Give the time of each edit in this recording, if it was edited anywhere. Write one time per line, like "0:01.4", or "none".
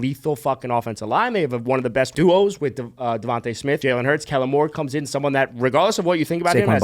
0:02.1
0:03.8